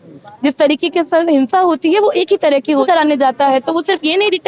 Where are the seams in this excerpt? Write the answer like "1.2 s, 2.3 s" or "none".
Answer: 2.8 s